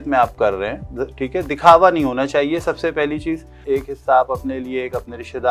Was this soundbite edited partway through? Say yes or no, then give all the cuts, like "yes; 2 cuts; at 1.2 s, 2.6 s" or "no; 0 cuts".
yes; 1 cut; at 3.5 s